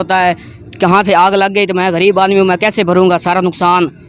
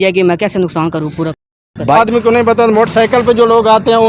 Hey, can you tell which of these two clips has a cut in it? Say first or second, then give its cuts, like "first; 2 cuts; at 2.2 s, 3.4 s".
second; 1 cut; at 2.0 s